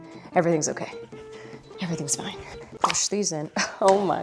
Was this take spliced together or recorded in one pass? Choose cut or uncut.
cut